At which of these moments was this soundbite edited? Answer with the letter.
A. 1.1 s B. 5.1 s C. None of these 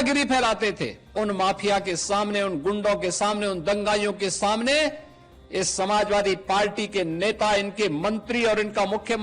A